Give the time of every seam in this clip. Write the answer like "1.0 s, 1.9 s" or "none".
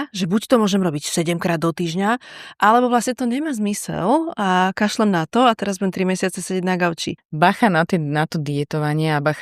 7.2 s